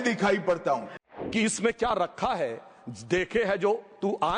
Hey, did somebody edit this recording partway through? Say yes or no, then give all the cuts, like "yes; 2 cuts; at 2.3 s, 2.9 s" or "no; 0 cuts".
yes; 1 cut; at 1.0 s